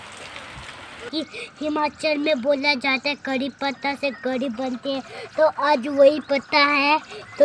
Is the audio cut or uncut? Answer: cut